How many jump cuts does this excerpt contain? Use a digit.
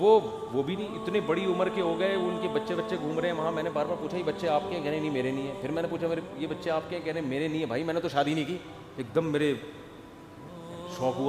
0